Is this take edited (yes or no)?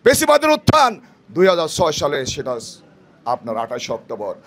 no